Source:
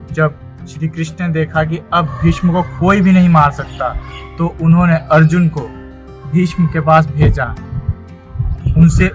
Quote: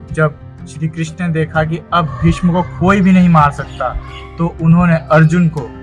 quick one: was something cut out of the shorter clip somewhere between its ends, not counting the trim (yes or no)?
no